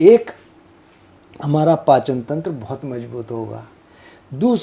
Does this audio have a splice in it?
no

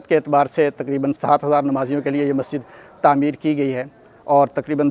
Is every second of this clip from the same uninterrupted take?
no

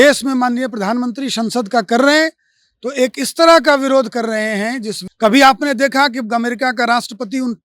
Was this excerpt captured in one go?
no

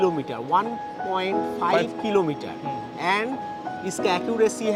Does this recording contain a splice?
no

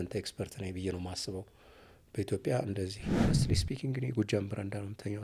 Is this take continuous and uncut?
no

